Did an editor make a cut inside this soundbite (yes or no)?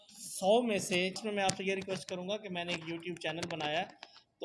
yes